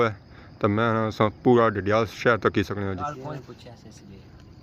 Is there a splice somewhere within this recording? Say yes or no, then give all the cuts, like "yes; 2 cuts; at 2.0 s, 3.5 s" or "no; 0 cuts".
yes; 1 cut; at 3.0 s